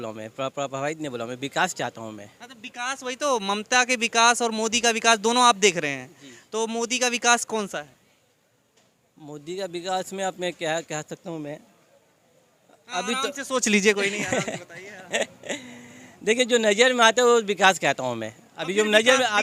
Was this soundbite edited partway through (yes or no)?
no